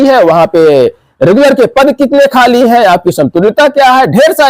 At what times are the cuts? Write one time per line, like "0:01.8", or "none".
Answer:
none